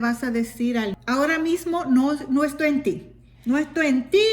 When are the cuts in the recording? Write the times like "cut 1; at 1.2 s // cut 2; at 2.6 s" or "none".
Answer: cut 1; at 1.0 s